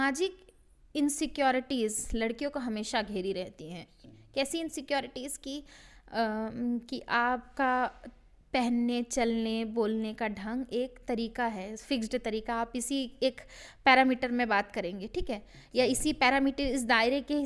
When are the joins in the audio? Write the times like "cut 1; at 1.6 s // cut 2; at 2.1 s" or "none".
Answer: none

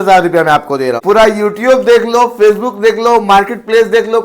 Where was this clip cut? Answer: cut 1; at 1.0 s

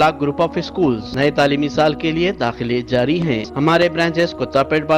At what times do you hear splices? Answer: cut 1; at 1.1 s // cut 2; at 3.5 s

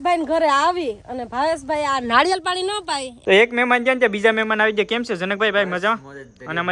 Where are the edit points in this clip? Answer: cut 1; at 3.1 s

